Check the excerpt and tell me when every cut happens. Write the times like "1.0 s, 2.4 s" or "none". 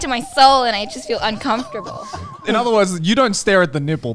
2.4 s